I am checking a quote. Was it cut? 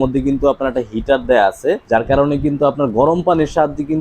yes; 1 cut; at 1.8 s

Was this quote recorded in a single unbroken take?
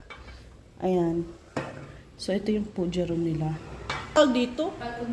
no; 1 cut; at 4.2 s

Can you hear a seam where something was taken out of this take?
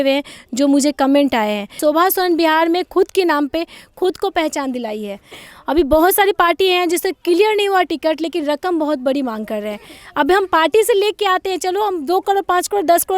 yes; 2 cuts; at 1.8 s, 5.4 s

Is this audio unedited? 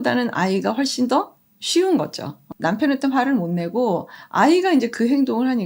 no; 2 cuts; at 2.5 s, 4.2 s

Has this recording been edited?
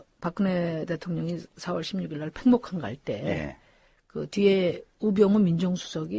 yes; 1 cut; at 4.3 s

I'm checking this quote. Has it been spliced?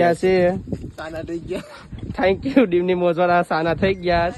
no; 0 cuts

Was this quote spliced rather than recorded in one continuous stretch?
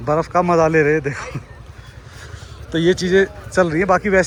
no; 0 cuts

